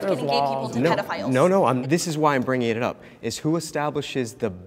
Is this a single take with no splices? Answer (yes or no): no